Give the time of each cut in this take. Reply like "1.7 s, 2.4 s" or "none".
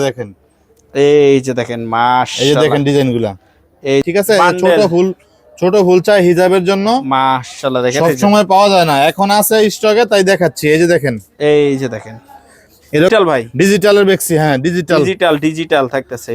4.0 s, 13.1 s